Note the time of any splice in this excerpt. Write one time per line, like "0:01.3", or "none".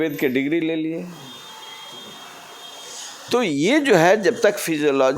0:01.0